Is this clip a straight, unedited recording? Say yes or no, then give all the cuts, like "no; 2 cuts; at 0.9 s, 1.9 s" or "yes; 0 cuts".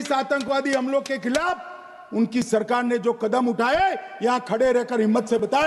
yes; 0 cuts